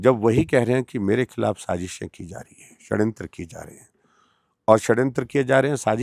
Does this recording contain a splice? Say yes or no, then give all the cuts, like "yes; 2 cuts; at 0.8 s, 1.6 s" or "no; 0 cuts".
no; 0 cuts